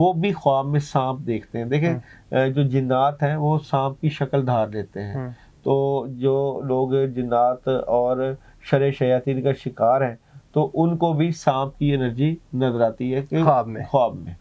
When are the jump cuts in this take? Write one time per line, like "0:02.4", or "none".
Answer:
none